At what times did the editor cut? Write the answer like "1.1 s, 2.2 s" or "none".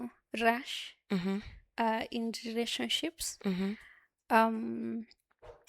none

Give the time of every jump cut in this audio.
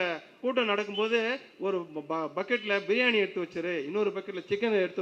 none

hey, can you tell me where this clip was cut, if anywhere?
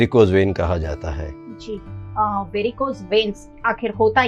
none

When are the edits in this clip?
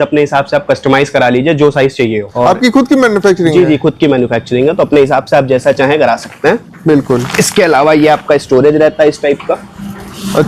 none

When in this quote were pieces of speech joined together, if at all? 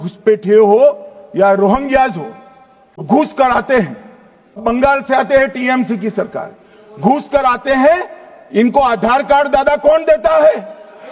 3.0 s, 4.6 s

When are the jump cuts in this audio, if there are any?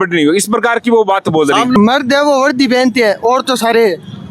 1.8 s

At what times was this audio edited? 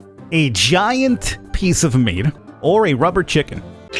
2.4 s

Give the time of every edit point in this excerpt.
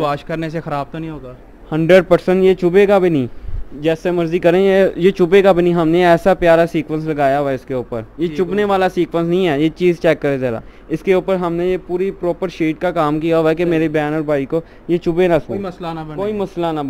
none

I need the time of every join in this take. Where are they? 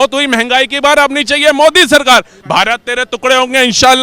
2.4 s

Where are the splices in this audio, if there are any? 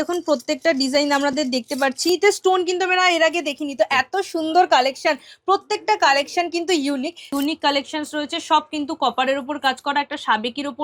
2.1 s, 7.3 s

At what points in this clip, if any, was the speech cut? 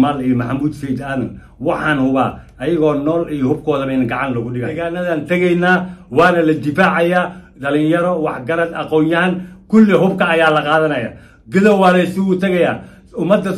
4.8 s

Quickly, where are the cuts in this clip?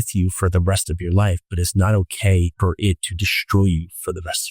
2.5 s

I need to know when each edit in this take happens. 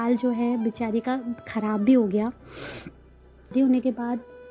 3.4 s

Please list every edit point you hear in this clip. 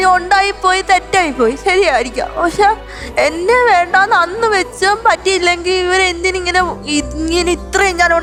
none

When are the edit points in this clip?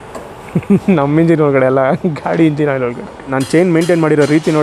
3.3 s

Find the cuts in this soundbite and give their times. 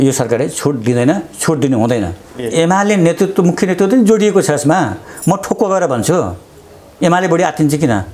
2.3 s

